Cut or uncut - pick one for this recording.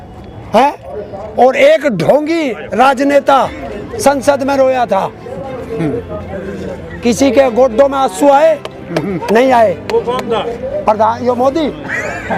uncut